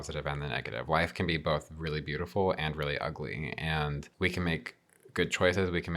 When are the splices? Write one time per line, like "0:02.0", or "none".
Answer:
0:04.1